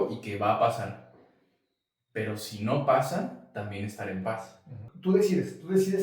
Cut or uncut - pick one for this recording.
cut